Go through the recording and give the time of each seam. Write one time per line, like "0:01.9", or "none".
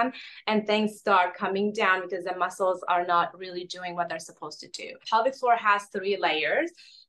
0:05.0